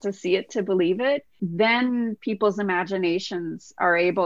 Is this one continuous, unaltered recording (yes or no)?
no